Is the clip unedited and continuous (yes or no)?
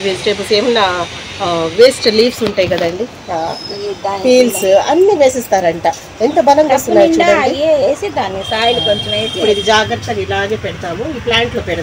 yes